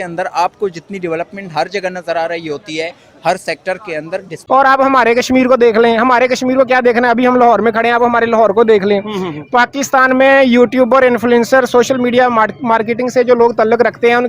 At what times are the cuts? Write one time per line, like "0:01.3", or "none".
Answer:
0:04.3